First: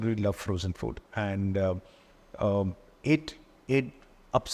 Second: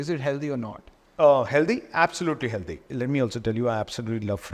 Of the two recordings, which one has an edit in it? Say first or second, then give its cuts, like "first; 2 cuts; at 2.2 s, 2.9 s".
second; 1 cut; at 2.9 s